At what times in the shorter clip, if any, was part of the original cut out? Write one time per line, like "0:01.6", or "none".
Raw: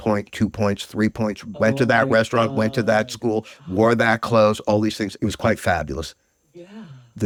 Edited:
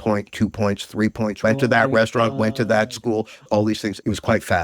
0:01.4
0:03.4